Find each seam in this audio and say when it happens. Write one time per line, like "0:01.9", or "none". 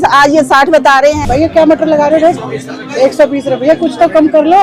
0:01.2